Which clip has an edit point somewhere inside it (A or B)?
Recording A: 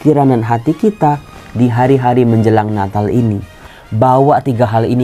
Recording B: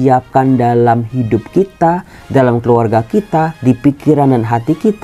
A